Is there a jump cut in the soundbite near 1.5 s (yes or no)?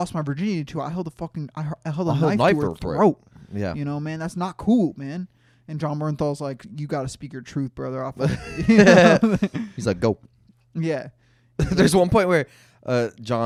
no